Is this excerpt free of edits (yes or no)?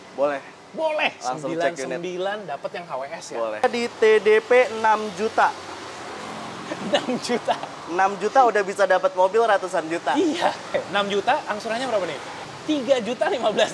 no